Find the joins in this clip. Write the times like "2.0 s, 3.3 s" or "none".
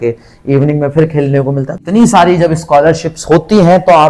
1.8 s